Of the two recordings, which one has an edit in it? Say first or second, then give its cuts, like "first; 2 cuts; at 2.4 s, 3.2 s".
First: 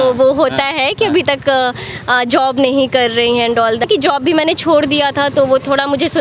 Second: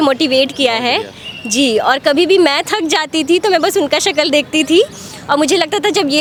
first; 1 cut; at 3.9 s